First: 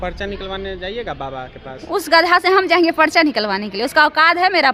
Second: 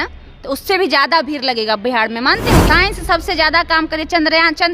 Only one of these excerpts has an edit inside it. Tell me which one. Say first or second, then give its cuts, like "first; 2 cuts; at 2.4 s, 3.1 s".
second; 1 cut; at 2.6 s